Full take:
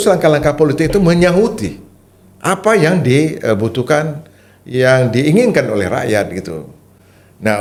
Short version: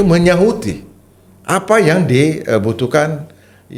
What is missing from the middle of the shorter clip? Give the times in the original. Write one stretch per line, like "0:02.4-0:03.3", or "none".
none